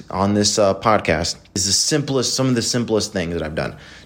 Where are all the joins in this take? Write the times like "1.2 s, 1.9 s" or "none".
1.7 s